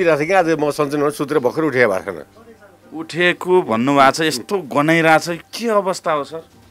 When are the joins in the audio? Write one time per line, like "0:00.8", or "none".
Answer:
none